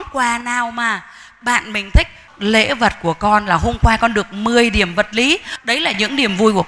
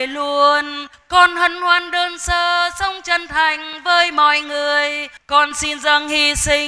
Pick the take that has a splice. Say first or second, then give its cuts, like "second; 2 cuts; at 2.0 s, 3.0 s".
first; 2 cuts; at 2.2 s, 5.5 s